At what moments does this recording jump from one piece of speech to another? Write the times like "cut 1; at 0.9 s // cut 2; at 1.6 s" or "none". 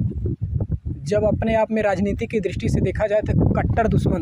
none